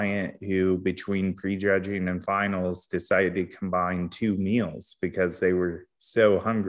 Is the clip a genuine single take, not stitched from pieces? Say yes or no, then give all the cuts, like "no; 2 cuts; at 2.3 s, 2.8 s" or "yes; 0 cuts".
yes; 0 cuts